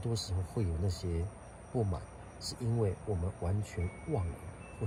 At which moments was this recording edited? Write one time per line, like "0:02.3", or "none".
none